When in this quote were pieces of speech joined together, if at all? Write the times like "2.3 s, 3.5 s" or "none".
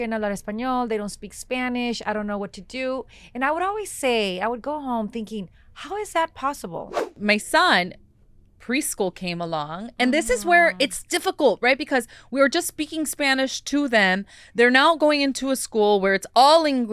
7.1 s

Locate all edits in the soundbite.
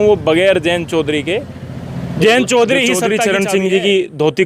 3.1 s

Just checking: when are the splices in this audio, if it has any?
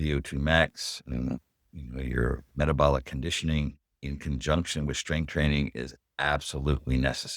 2.5 s

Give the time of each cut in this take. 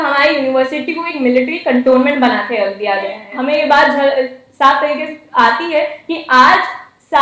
3.2 s

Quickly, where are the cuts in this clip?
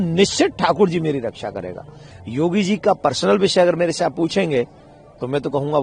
2.0 s

